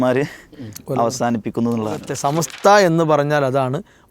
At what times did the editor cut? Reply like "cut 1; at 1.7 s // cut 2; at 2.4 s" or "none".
cut 1; at 2.1 s